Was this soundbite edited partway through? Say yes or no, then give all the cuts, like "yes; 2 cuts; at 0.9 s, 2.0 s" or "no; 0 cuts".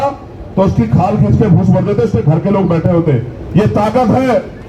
no; 0 cuts